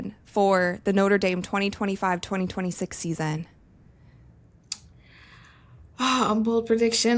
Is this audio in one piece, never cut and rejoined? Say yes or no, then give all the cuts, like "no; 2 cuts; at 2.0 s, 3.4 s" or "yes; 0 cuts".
yes; 0 cuts